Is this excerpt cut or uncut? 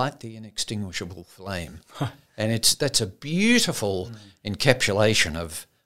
uncut